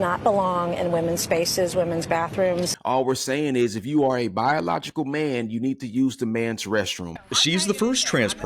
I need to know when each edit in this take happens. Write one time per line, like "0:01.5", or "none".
0:02.7
0:07.2